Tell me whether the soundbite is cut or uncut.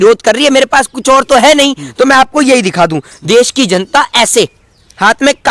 uncut